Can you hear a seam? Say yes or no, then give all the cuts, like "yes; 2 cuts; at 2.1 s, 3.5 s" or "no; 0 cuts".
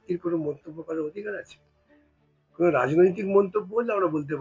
no; 0 cuts